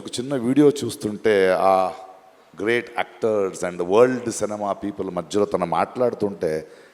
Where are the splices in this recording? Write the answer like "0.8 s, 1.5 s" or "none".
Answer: none